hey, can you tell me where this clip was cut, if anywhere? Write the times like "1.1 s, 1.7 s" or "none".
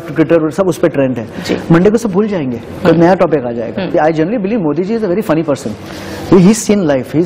3.9 s